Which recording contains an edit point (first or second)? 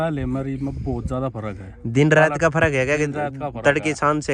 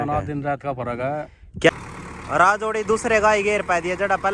second